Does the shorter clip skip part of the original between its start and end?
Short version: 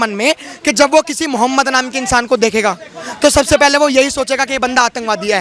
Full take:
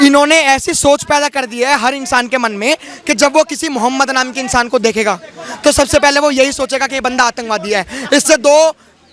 no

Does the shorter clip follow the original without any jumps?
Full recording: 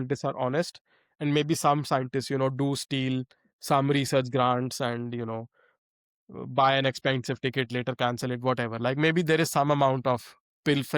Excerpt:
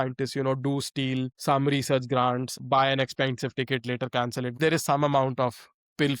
no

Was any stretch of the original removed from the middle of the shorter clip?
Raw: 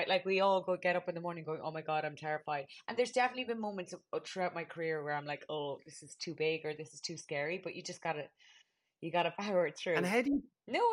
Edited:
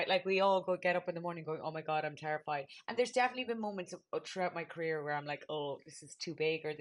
no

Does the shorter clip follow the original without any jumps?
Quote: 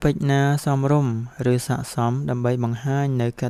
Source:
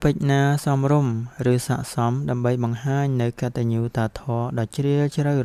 yes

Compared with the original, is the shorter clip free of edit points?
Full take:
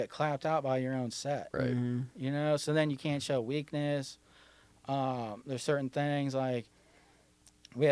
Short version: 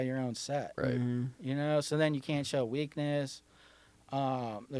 yes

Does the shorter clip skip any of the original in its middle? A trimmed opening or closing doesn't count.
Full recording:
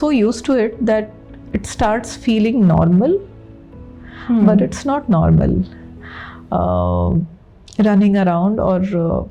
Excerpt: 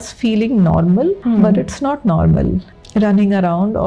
yes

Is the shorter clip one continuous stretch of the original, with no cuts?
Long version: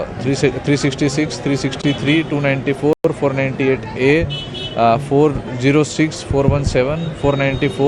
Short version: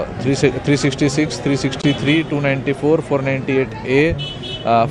no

